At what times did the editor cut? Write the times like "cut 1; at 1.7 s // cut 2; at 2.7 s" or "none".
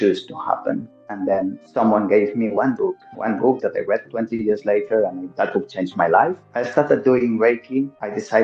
cut 1; at 0.9 s // cut 2; at 5.2 s // cut 3; at 6.5 s